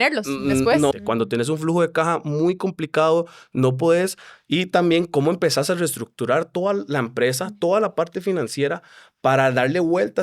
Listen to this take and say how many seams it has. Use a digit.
1